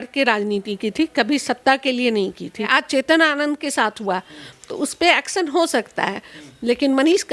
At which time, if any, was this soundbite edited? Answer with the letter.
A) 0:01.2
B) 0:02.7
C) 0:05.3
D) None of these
B